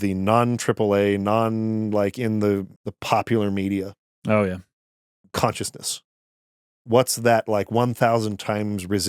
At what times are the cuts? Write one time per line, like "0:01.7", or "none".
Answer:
0:02.7